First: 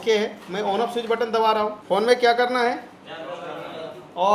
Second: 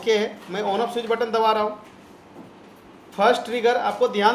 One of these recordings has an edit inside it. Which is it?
first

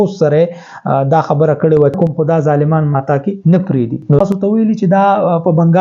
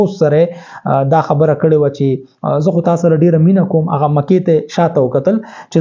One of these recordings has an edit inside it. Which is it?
first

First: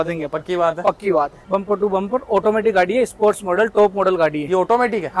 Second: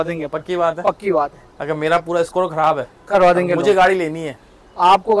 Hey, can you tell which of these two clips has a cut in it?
first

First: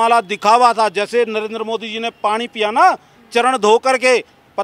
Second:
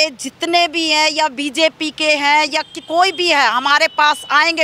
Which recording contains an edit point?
second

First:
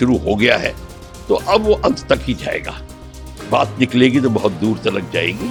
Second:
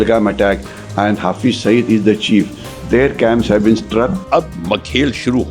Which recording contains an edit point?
second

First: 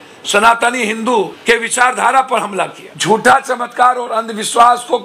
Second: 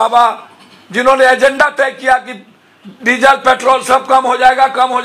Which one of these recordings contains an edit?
first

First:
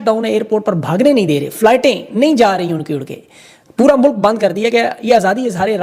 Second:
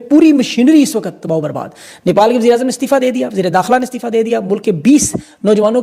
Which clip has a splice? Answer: first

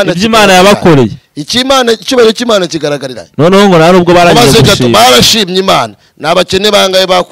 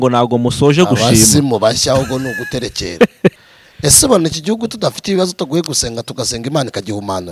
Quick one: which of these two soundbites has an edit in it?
second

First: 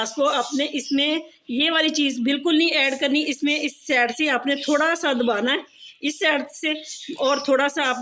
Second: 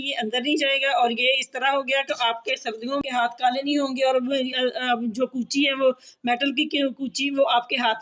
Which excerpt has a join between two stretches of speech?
second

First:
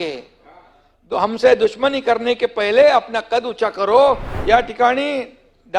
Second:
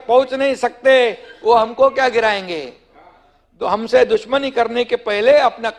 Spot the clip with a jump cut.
first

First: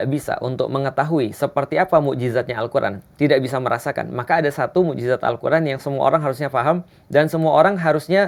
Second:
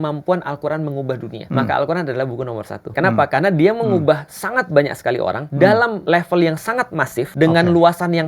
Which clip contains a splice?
second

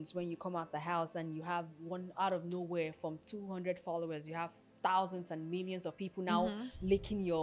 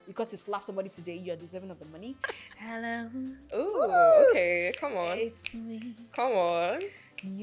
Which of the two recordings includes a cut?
second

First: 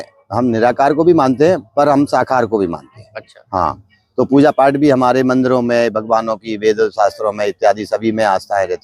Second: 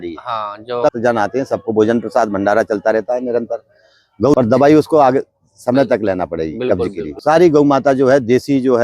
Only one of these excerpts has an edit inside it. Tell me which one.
second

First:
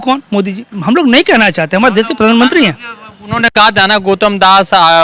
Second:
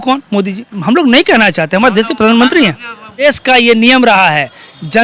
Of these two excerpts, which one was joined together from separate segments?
second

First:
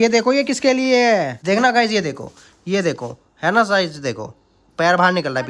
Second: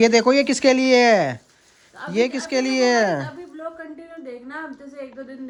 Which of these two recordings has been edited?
first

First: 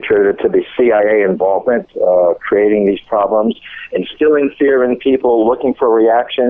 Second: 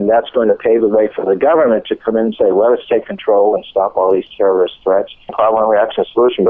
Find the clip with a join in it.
second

